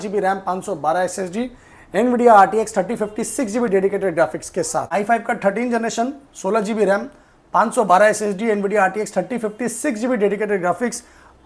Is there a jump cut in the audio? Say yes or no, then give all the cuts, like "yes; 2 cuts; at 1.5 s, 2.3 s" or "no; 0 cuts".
yes; 1 cut; at 4.9 s